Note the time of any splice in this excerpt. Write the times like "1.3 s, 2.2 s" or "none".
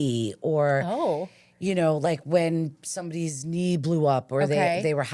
none